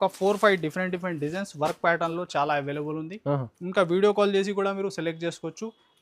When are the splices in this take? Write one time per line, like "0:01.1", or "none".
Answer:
none